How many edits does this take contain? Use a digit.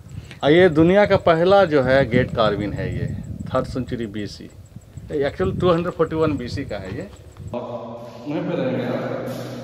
1